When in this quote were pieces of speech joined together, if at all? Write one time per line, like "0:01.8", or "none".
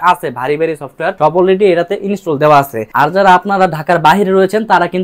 0:01.1
0:02.8